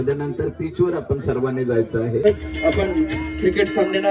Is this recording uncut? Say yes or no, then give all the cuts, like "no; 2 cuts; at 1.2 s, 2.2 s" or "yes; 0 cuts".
no; 1 cut; at 2.3 s